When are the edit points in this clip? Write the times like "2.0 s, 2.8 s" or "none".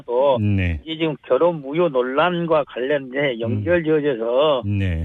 none